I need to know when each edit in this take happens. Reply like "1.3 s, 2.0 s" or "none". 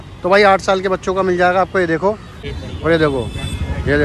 2.4 s

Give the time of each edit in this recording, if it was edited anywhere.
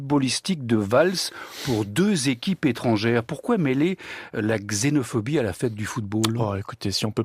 5.4 s

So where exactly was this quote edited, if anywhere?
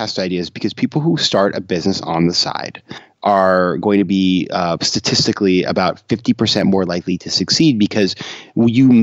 3.0 s

